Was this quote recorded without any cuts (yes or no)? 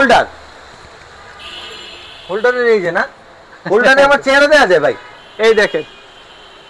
yes